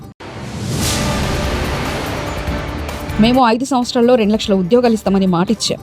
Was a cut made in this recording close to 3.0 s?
yes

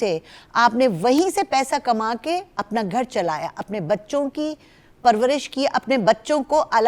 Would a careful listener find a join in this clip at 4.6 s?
no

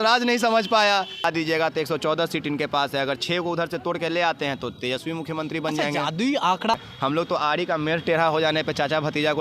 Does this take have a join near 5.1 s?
no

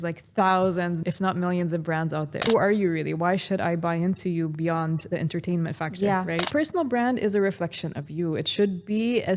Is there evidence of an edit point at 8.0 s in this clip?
no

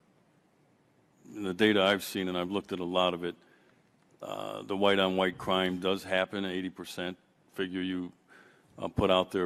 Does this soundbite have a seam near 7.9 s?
yes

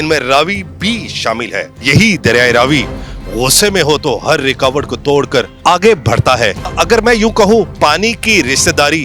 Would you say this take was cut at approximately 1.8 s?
yes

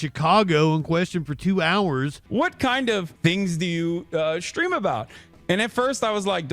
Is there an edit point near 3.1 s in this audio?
yes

